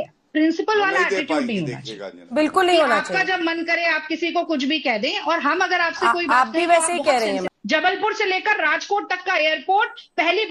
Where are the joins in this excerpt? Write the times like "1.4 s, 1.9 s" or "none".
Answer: 7.5 s